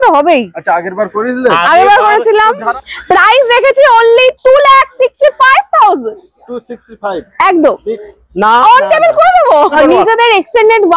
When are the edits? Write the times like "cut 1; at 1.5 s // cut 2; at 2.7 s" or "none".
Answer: cut 1; at 2.8 s // cut 2; at 9.8 s